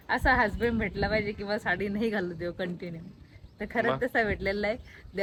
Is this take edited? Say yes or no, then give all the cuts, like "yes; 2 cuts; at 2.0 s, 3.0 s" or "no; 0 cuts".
no; 0 cuts